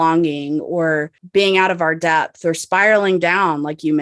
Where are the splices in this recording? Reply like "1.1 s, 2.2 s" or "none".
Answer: 1.2 s